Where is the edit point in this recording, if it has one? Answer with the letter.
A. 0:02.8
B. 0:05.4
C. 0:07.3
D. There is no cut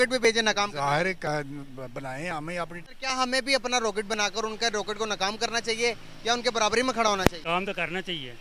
A